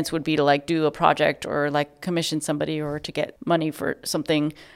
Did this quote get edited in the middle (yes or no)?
yes